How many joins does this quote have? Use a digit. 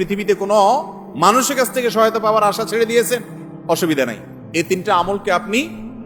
0